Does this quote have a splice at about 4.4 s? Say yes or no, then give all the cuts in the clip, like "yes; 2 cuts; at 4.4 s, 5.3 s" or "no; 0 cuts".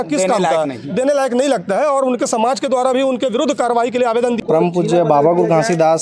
yes; 1 cut; at 4.4 s